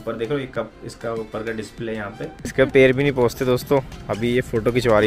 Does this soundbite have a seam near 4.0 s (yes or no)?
no